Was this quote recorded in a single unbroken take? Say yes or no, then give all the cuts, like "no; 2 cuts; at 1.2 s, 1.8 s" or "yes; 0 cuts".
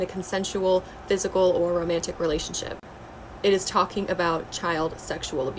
yes; 0 cuts